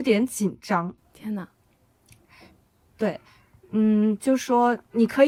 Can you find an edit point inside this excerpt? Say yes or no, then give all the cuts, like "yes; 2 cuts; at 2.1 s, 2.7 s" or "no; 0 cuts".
no; 0 cuts